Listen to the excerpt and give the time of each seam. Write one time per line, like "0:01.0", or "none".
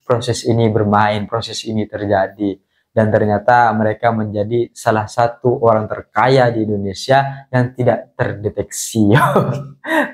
none